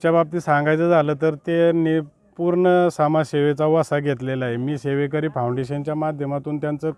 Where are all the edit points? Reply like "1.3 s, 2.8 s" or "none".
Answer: none